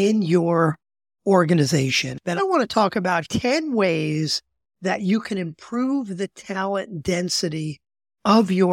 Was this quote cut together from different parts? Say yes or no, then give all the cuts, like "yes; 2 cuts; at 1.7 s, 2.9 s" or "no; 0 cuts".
yes; 2 cuts; at 2.4 s, 3.3 s